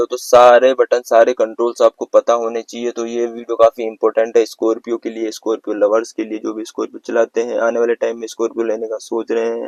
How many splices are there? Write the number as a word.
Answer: zero